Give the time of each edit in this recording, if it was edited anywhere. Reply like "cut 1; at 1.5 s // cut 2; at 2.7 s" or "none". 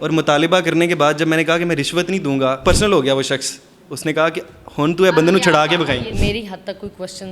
cut 1; at 2.6 s // cut 2; at 6.1 s